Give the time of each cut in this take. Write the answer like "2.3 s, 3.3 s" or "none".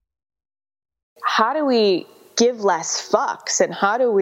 1.2 s